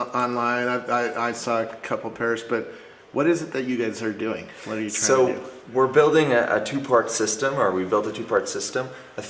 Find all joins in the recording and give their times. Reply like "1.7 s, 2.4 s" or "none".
none